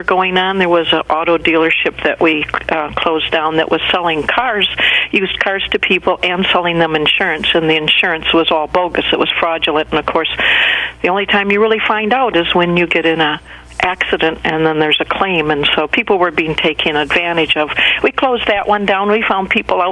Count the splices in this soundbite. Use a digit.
1